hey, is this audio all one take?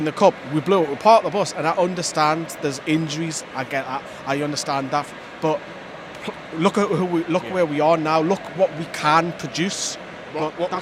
yes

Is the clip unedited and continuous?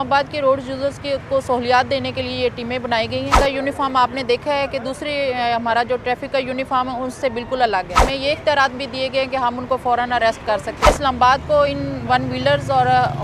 no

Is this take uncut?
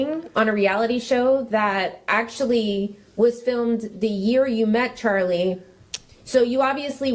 yes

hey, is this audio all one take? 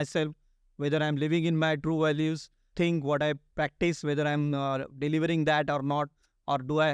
no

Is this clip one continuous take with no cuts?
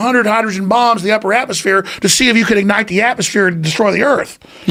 yes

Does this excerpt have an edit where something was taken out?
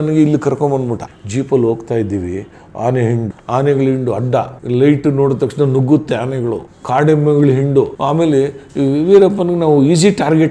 yes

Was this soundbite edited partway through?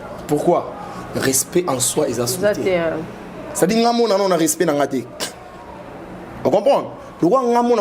no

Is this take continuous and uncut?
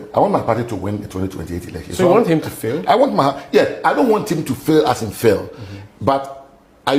yes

